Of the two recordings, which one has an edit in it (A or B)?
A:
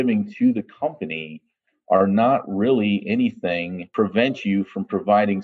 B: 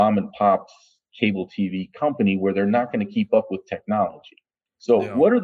A